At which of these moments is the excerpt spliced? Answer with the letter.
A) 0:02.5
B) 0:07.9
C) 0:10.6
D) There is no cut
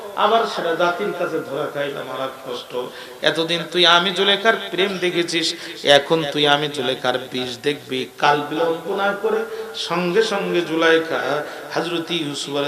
D